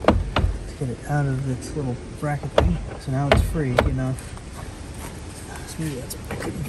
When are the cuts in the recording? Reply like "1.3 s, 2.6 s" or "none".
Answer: none